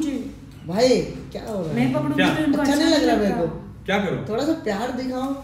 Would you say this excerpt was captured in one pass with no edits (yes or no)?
yes